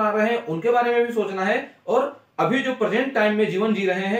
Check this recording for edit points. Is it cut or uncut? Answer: uncut